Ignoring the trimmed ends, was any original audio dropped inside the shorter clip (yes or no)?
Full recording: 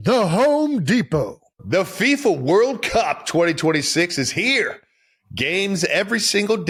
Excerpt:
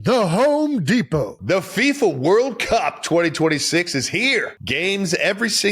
yes